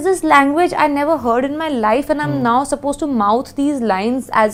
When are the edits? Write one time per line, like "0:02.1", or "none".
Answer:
none